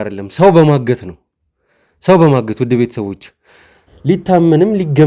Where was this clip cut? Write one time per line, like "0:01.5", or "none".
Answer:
0:03.9